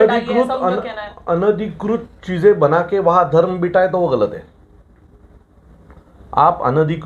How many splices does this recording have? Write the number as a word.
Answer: zero